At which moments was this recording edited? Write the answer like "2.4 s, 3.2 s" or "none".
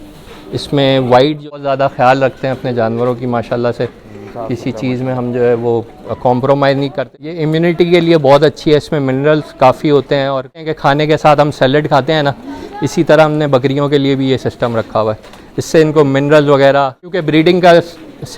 1.6 s, 7.0 s, 10.7 s, 17.2 s